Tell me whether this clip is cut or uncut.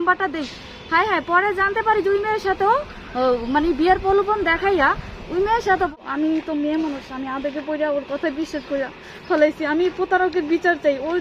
cut